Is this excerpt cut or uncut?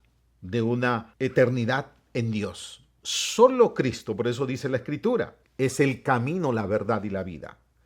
cut